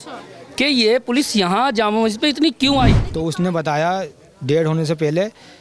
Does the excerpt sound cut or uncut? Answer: cut